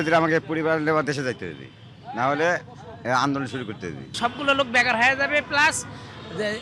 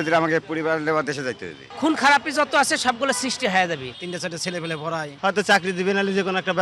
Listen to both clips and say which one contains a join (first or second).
second